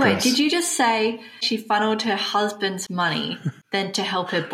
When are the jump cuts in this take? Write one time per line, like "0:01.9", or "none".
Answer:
0:01.5
0:03.5